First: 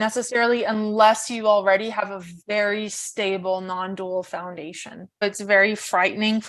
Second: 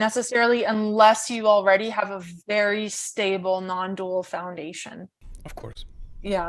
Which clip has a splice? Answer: first; 1 cut; at 5.2 s

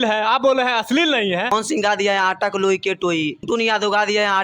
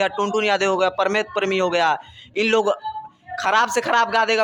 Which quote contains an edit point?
first; 2 cuts; at 1.5 s, 3.4 s

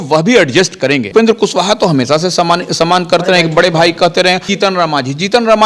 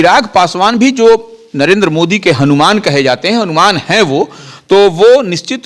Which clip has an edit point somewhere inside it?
first; 2 cuts; at 1.1 s, 4.5 s

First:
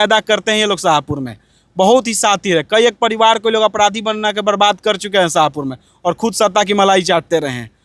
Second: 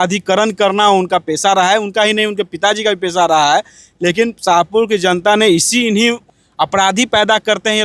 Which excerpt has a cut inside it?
second; 1 cut; at 6.3 s

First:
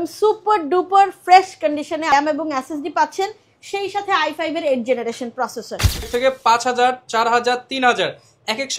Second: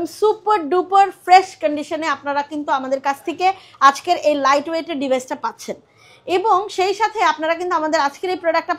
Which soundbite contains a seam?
first; 2 cuts; at 2.1 s, 6.1 s

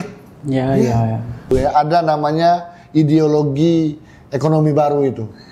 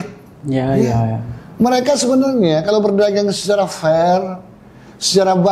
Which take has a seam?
first; 1 cut; at 1.5 s

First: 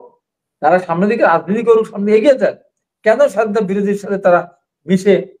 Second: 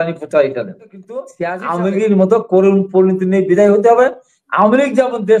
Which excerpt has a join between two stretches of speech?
second; 1 cut; at 1.3 s

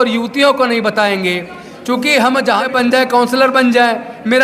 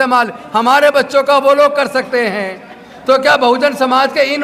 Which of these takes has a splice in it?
first; 1 cut; at 2.7 s

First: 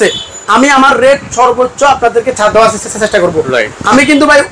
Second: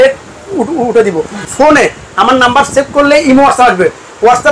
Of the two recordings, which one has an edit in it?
second; 1 cut; at 1.4 s

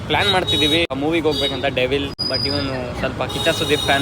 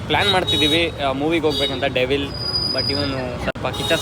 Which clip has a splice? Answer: first; 2 cuts; at 0.9 s, 2.2 s

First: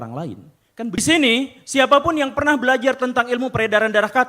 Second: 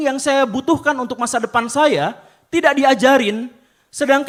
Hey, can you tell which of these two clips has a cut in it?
first; 1 cut; at 1.0 s

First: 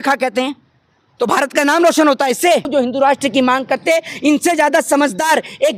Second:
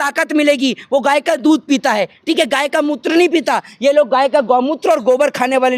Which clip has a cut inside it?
first; 1 cut; at 2.7 s

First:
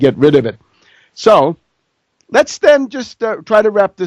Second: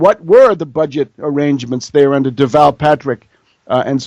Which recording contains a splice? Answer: first; 1 cut; at 2.0 s

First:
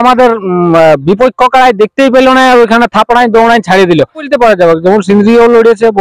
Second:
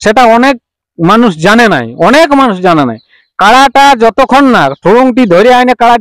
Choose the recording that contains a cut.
first; 1 cut; at 4.3 s

